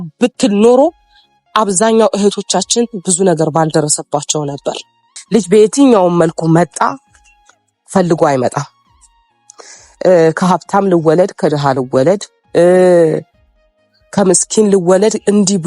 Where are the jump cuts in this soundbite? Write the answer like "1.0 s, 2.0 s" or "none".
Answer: 5.2 s